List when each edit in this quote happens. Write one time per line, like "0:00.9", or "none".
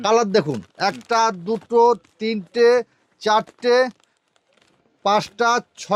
none

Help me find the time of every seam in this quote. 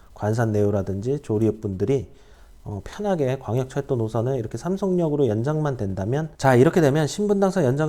0:06.3

